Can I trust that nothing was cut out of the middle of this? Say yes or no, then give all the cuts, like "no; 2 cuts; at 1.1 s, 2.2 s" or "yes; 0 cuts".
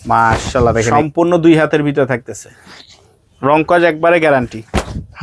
no; 1 cut; at 0.9 s